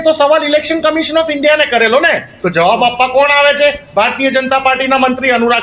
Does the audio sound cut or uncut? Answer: uncut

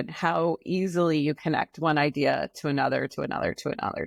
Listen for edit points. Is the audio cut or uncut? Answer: uncut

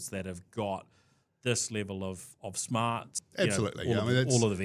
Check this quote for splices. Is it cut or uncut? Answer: cut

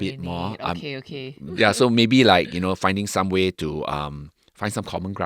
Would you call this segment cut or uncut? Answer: cut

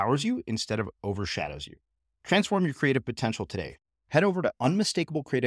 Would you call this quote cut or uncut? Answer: uncut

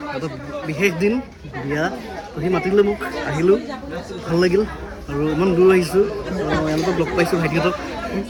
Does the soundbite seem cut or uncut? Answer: uncut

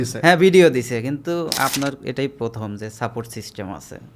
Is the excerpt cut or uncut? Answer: uncut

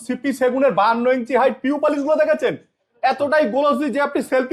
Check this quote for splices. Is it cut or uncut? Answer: uncut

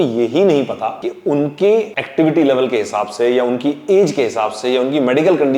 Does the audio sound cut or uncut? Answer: cut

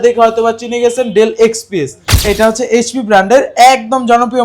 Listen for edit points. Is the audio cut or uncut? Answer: cut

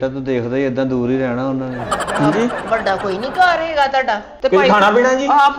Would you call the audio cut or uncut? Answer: cut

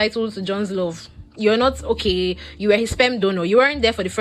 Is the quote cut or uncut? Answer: uncut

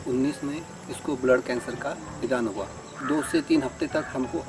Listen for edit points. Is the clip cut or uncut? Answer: cut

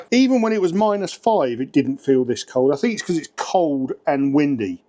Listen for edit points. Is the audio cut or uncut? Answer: uncut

